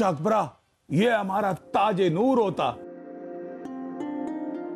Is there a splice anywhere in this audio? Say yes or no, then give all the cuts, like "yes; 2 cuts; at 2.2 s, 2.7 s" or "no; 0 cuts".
no; 0 cuts